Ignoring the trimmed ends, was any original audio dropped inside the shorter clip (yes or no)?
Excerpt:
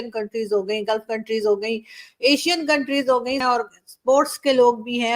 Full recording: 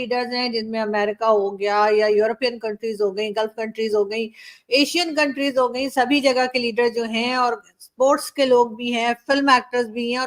yes